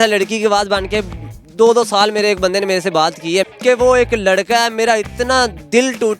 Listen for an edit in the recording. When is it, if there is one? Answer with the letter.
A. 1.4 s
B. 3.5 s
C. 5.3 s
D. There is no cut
B